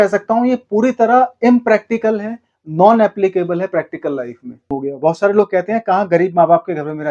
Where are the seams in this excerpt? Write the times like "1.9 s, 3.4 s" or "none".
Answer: 4.7 s